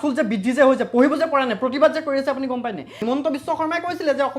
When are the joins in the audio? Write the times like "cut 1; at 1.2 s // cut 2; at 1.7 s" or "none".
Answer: cut 1; at 2.9 s

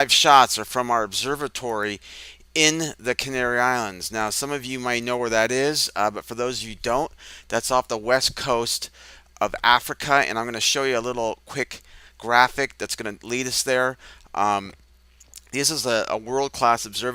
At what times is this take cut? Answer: none

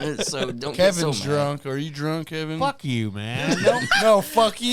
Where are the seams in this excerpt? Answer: none

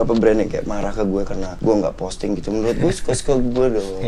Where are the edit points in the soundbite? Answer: cut 1; at 1.4 s

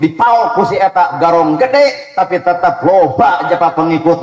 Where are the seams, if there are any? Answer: none

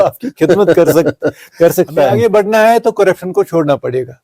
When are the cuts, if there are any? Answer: cut 1; at 2.2 s

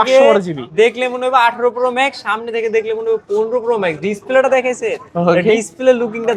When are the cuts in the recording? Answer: none

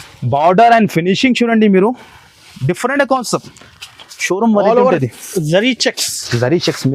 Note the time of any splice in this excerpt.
none

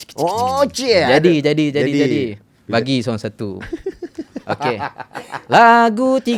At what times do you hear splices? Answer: none

